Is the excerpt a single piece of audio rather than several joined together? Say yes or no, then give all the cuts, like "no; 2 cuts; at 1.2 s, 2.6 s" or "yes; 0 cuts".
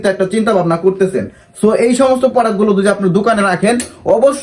yes; 0 cuts